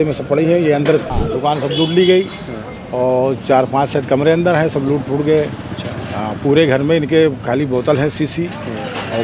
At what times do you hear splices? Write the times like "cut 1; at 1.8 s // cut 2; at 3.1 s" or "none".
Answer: cut 1; at 1.2 s